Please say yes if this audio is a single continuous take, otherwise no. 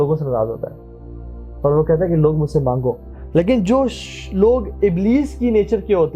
no